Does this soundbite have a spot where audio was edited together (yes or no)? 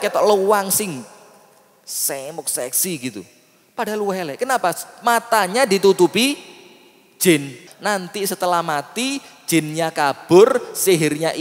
yes